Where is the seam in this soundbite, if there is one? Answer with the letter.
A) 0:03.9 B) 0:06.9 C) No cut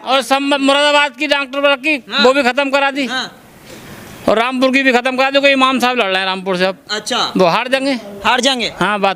C